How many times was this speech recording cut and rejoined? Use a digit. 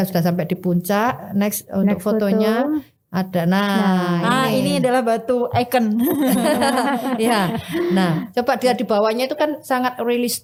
0